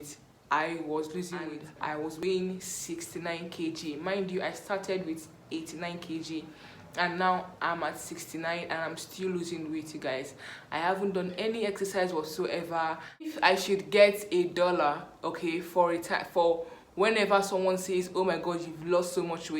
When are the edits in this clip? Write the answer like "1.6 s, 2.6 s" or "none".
2.0 s, 13.3 s